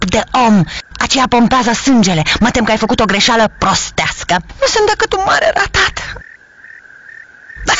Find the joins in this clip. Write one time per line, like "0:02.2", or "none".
0:02.7